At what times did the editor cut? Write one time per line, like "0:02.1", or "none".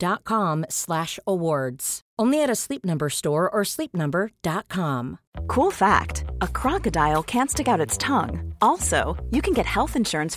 0:05.2